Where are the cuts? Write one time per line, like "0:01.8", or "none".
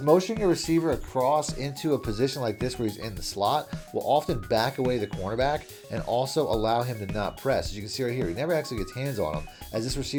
none